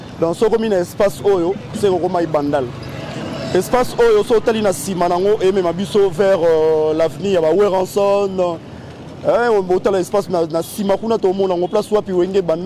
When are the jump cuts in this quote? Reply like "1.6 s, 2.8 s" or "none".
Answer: none